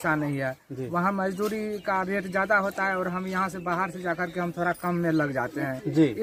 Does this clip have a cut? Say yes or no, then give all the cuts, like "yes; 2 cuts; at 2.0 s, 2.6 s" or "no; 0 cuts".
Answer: no; 0 cuts